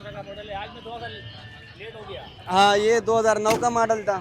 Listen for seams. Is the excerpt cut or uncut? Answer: uncut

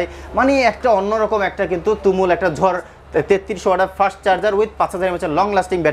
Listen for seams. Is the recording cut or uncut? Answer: cut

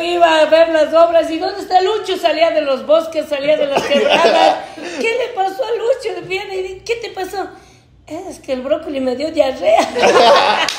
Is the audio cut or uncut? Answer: uncut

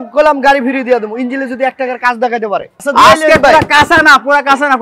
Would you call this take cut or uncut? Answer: cut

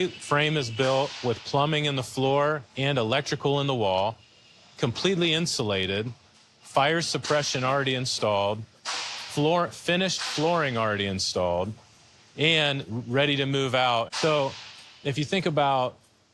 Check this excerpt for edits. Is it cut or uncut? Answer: cut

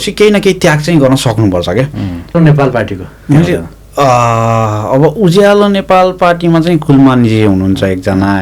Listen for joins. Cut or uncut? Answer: cut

